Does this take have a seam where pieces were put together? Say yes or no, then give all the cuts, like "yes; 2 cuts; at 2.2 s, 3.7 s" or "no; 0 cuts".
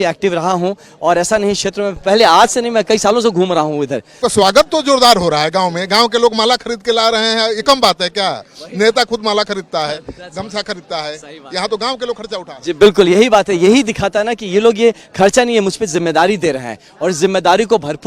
yes; 1 cut; at 4.1 s